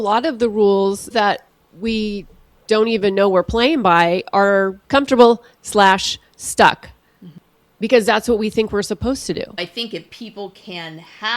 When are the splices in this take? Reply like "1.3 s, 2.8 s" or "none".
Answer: 1.1 s, 4.8 s, 9.7 s